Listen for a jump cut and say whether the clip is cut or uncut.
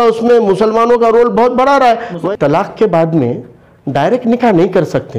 cut